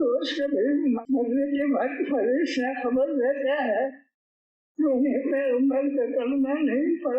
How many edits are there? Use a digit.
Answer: 1